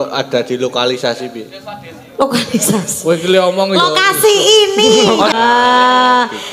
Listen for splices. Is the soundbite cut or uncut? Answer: cut